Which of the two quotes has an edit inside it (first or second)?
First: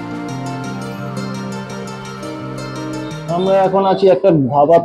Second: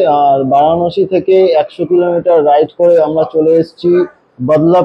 first